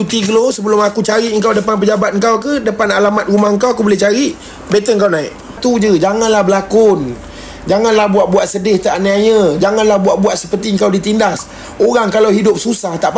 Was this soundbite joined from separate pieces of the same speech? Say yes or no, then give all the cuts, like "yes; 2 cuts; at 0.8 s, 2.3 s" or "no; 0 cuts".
yes; 1 cut; at 5.6 s